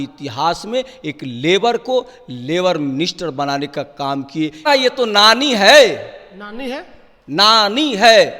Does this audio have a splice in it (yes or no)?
yes